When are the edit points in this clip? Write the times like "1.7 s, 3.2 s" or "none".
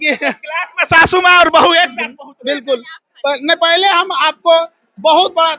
none